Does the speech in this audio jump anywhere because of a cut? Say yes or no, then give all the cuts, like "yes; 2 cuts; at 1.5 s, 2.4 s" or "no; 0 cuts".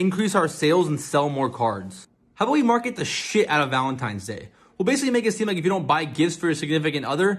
no; 0 cuts